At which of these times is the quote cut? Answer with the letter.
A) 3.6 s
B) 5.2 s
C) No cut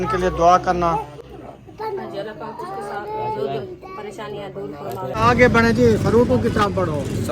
B